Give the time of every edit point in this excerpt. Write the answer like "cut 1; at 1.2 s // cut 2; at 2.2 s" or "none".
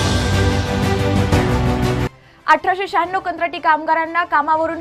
cut 1; at 2.0 s